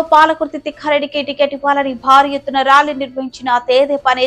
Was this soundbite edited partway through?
no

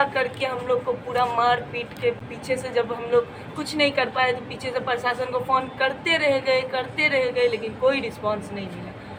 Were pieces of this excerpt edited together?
no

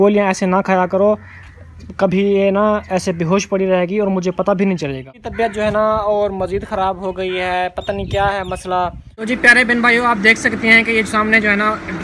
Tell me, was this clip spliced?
yes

